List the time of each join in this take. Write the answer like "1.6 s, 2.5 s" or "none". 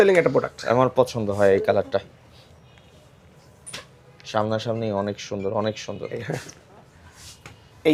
none